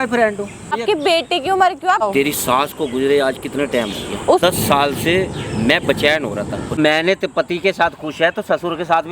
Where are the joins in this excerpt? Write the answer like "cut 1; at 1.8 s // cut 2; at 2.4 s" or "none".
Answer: cut 1; at 0.7 s // cut 2; at 2.0 s // cut 3; at 4.4 s // cut 4; at 6.8 s